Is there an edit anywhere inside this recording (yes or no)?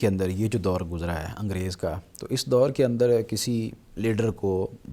no